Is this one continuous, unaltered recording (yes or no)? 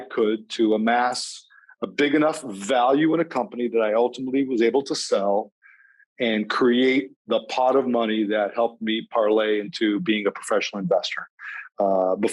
yes